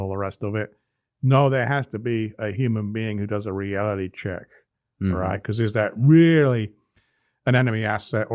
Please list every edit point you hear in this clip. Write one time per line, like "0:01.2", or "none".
none